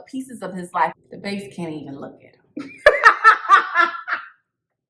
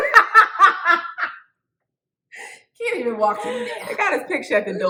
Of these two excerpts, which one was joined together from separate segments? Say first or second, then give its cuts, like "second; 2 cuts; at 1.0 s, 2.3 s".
first; 1 cut; at 1.0 s